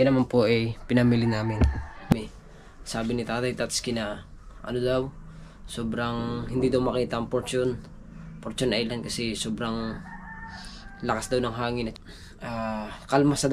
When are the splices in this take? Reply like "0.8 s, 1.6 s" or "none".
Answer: 2.2 s, 12.0 s